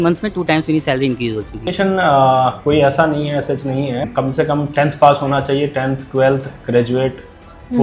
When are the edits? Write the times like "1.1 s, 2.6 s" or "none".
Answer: 1.7 s, 4.0 s